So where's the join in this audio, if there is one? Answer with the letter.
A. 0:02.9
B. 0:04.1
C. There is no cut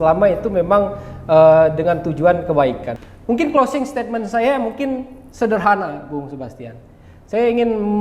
A